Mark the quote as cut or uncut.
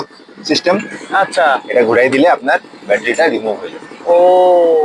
uncut